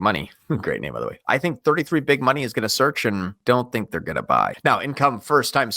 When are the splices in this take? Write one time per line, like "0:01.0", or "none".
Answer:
0:03.3
0:04.5